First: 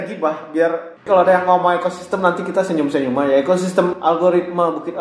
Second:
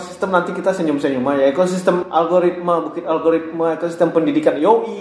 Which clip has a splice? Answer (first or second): first